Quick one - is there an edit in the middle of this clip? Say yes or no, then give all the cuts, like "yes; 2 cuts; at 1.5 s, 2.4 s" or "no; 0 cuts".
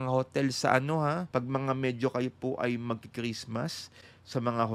yes; 1 cut; at 1.2 s